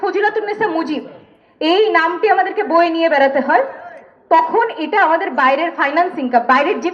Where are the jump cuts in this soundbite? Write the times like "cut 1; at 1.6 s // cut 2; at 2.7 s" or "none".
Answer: none